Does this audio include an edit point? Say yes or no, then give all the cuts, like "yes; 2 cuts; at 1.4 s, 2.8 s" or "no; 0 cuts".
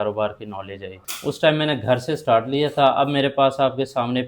yes; 1 cut; at 1.1 s